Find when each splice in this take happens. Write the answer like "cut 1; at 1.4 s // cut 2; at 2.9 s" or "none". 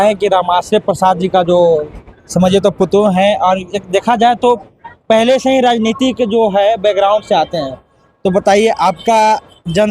none

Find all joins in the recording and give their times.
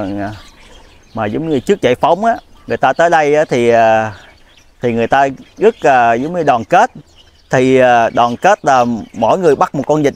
none

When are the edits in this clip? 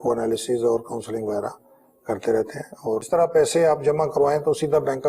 cut 1; at 2.9 s

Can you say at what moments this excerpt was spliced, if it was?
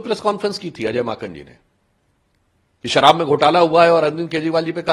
none

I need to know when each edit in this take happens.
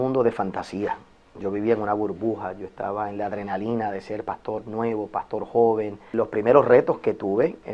cut 1; at 6.1 s

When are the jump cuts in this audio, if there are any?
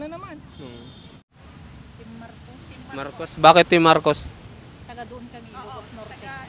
cut 1; at 1.1 s

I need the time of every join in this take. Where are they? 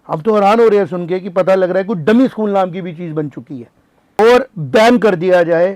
cut 1; at 4.2 s

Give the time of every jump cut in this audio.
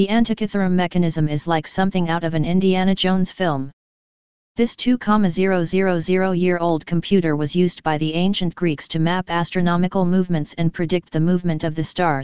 none

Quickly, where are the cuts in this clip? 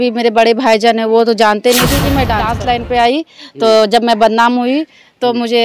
cut 1; at 2.5 s

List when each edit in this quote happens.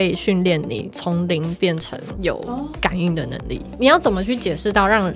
cut 1; at 0.9 s // cut 2; at 2.3 s // cut 3; at 3.7 s

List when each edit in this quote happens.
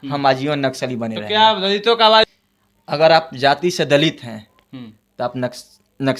cut 1; at 2.2 s

